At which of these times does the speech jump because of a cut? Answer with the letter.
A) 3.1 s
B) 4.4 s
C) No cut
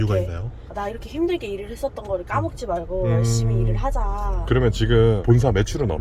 B